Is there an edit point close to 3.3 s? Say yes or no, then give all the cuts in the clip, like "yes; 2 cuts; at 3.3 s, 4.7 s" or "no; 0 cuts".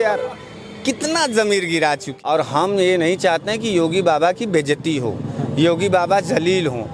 no; 1 cut; at 2.1 s